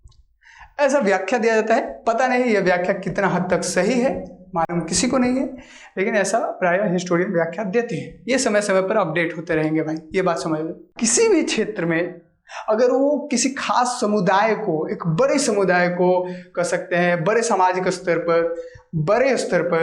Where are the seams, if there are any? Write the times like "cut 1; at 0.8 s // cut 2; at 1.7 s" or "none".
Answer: cut 1; at 10.9 s

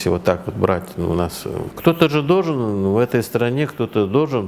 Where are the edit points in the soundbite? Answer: cut 1; at 1.7 s

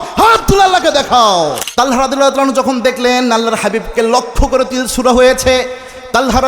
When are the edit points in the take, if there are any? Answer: cut 1; at 1.6 s

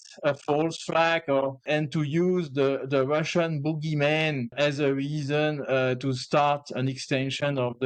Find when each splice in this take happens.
cut 1; at 1.6 s // cut 2; at 4.5 s

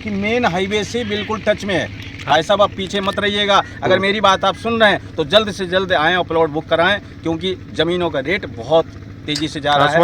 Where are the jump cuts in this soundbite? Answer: cut 1; at 2.2 s

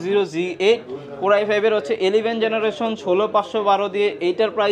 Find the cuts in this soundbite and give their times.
none

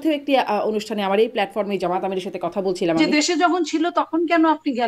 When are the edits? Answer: cut 1; at 3.0 s

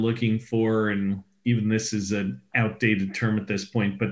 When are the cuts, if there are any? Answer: none

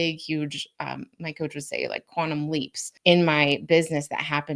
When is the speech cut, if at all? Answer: cut 1; at 2.8 s

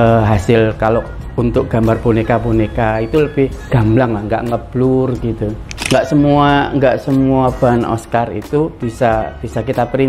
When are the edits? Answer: cut 1; at 3.7 s // cut 2; at 5.8 s

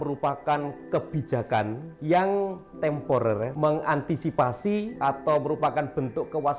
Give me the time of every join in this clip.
cut 1; at 1.9 s // cut 2; at 3.5 s // cut 3; at 4.9 s

